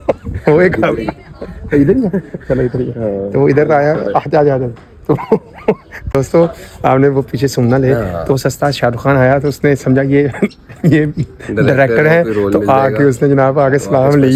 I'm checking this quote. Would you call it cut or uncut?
uncut